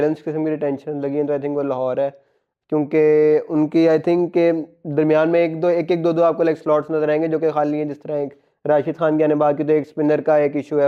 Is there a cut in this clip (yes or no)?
no